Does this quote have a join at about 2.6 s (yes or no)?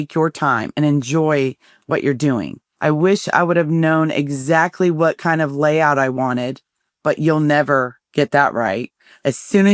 yes